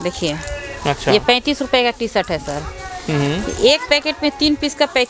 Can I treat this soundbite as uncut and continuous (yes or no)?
yes